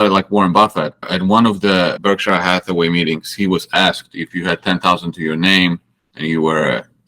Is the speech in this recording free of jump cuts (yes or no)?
no